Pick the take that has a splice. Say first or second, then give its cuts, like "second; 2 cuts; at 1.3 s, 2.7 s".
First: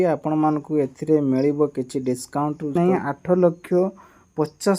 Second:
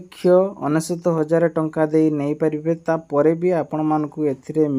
first; 1 cut; at 2.8 s